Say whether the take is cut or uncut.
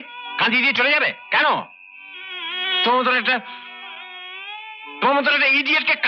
uncut